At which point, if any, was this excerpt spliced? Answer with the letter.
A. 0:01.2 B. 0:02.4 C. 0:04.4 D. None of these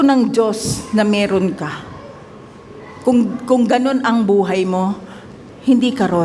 D